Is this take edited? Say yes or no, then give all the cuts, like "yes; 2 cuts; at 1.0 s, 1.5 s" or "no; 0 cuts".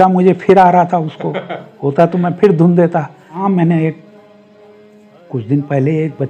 yes; 1 cut; at 3.4 s